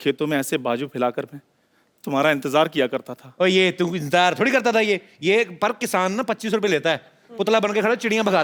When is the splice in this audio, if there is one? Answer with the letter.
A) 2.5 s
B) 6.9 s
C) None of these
C